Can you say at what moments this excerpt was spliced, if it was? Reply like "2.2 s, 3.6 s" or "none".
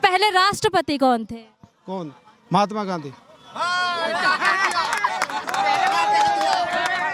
none